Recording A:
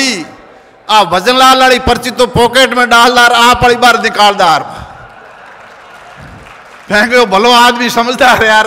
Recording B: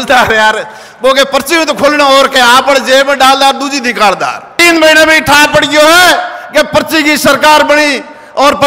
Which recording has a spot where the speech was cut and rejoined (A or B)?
B